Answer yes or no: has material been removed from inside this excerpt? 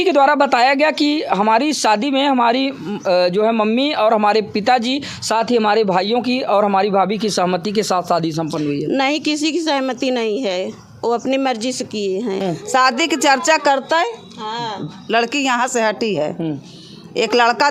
yes